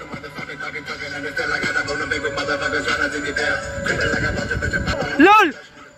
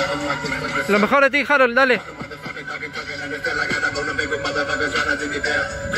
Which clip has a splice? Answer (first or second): first